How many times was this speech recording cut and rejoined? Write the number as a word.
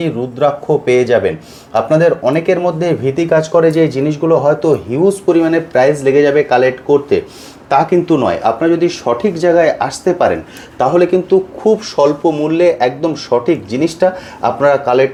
zero